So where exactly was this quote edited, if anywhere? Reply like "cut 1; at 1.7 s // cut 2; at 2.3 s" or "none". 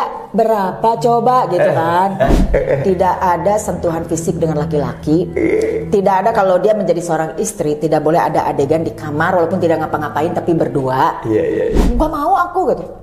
cut 1; at 2.4 s // cut 2; at 11.8 s